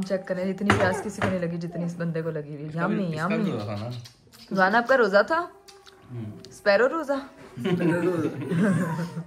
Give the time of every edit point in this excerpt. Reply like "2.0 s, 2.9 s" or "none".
none